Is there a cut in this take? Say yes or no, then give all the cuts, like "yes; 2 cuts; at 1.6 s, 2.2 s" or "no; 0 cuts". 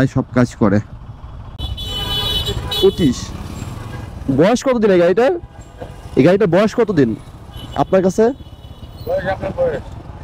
yes; 1 cut; at 1.6 s